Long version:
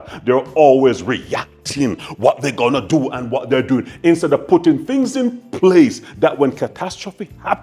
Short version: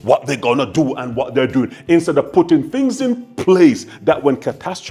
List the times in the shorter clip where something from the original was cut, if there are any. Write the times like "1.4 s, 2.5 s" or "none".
none